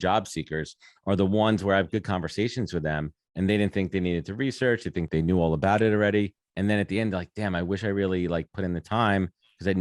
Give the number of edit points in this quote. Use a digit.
2